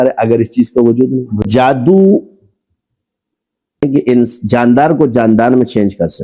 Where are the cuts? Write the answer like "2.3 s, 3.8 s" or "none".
1.4 s, 3.8 s

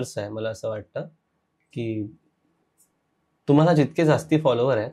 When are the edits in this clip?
none

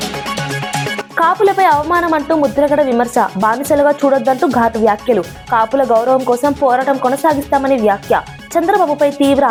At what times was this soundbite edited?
none

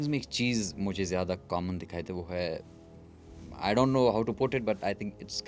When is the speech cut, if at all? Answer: none

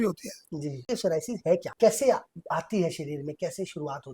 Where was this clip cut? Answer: 0.8 s, 1.7 s

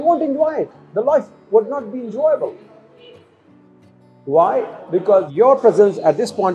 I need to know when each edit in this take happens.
5.3 s

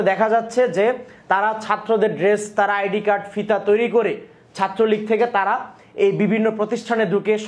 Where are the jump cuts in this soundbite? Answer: none

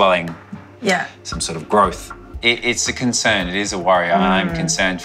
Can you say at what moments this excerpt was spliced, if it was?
2.3 s

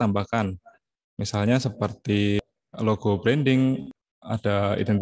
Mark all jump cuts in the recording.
2.4 s, 4.0 s

